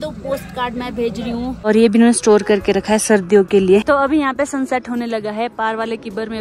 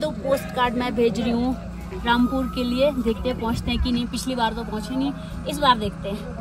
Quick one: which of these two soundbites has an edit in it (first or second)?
first